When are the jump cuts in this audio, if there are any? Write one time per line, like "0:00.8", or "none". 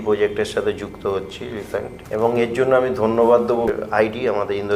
0:02.0
0:03.7